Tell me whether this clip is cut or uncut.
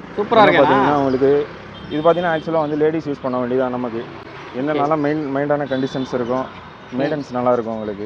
uncut